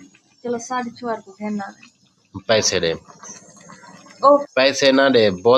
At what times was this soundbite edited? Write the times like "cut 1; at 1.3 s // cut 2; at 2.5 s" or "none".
cut 1; at 4.4 s